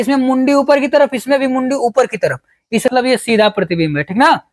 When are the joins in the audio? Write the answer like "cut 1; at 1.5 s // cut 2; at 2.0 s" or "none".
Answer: cut 1; at 2.9 s

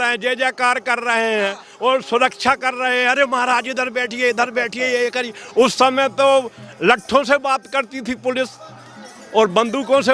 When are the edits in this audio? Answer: none

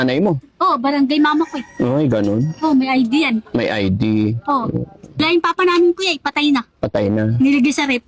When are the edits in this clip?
cut 1; at 5.2 s

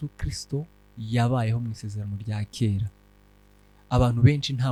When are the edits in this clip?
none

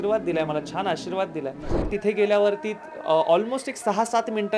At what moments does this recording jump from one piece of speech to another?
cut 1; at 1.9 s

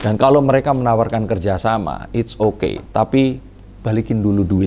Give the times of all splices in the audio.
none

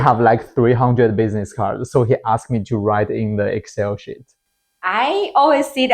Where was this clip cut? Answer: cut 1; at 4.3 s

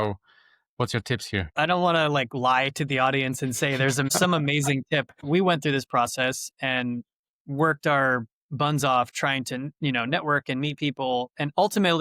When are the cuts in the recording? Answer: cut 1; at 1.5 s // cut 2; at 4.1 s // cut 3; at 5.2 s

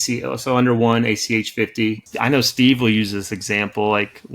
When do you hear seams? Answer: cut 1; at 2.0 s

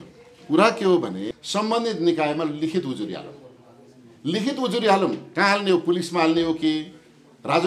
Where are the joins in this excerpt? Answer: cut 1; at 1.3 s

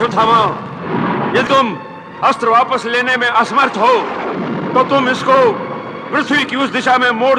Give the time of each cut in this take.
cut 1; at 1.5 s

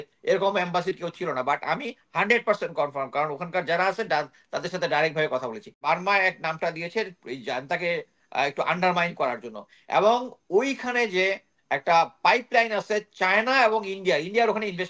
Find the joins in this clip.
cut 1; at 5.8 s

